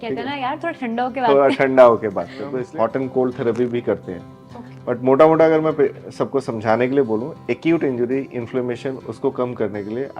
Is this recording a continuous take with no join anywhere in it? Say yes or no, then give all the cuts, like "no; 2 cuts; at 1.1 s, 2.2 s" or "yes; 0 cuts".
no; 1 cut; at 2.6 s